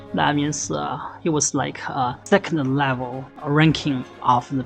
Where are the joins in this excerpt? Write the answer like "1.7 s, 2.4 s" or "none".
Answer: 2.2 s, 3.3 s